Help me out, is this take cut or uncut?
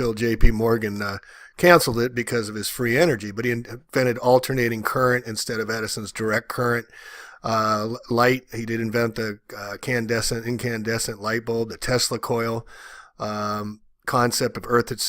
cut